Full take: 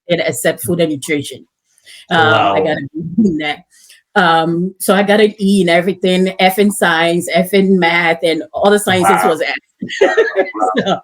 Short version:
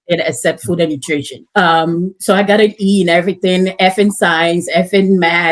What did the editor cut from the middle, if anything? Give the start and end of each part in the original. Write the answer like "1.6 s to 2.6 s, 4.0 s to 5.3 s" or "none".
1.4 s to 4.0 s

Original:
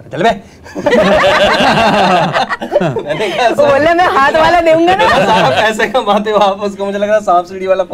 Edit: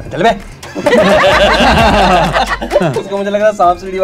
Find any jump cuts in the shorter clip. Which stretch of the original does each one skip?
3.0 s to 6.7 s

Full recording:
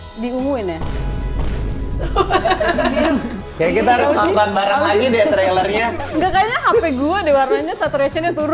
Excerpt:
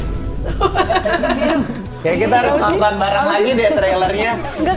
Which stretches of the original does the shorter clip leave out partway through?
none

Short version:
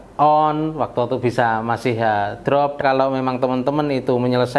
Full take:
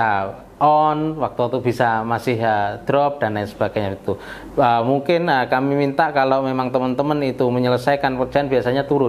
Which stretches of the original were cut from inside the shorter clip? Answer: 3.2 s to 6.1 s

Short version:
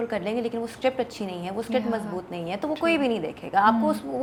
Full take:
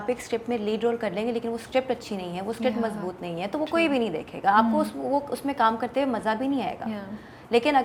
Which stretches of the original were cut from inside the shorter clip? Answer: none

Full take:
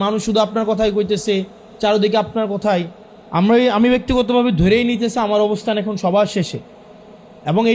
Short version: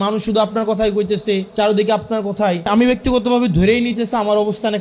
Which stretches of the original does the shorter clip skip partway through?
1.5 s to 1.7 s, 2.9 s to 3.7 s

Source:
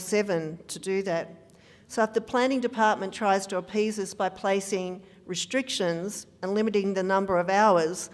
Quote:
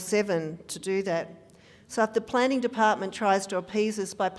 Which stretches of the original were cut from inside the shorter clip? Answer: none

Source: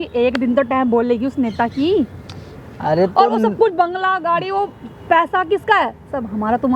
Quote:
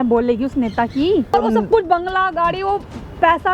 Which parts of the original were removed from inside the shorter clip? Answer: 2.2 s to 3.2 s

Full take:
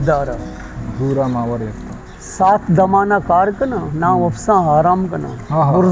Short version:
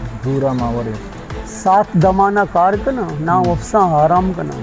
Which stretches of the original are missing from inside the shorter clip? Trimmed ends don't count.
none

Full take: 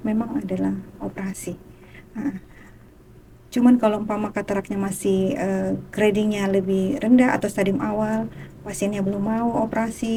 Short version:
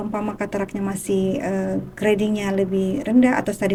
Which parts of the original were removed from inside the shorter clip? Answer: none

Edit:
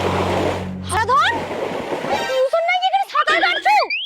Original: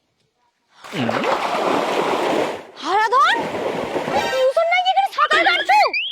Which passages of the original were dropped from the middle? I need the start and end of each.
2.9 s to 3.0 s

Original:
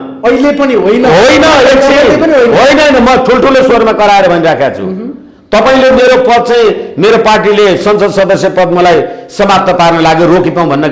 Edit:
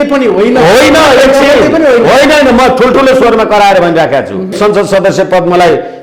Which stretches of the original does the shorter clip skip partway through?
5.0 s to 7.8 s

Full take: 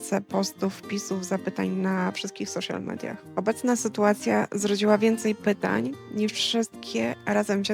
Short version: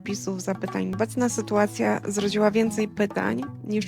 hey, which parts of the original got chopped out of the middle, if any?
1.8 s to 3.4 s

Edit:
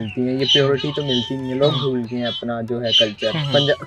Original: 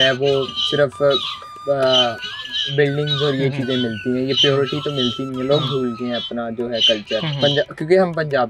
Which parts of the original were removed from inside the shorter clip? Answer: none

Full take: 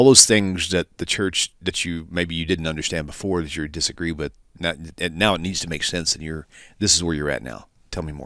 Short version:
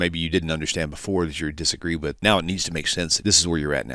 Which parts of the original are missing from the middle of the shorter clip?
4.3 s to 5.1 s, 6.1 s to 6.7 s

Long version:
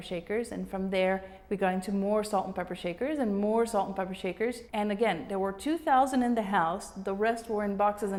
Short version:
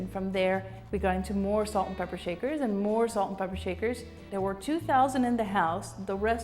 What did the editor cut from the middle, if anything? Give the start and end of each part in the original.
4.8 s to 5.2 s

